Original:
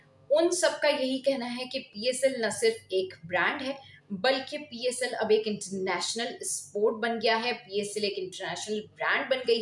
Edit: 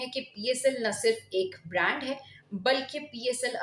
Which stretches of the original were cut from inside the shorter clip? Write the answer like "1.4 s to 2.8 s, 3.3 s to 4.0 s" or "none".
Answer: none